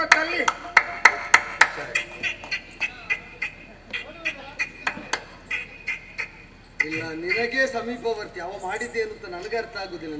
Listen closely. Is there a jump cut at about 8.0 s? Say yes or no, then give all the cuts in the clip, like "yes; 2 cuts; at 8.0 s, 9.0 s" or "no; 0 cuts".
no; 0 cuts